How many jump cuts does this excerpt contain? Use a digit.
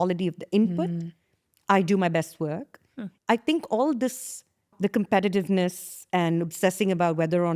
2